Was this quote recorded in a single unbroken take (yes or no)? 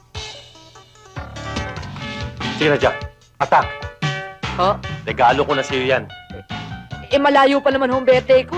no